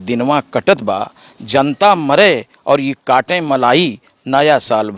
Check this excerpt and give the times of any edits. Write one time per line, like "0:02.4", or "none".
none